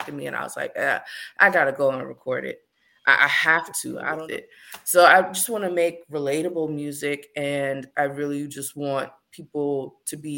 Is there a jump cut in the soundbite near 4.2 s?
yes; 1 cut; at 4.2 s

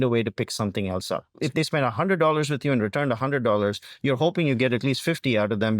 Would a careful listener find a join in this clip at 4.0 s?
no; 1 cut; at 1.4 s

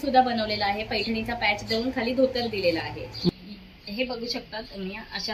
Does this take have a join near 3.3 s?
yes; 1 cut; at 3.3 s

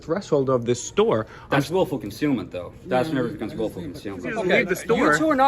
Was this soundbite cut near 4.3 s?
yes; 1 cut; at 4.3 s

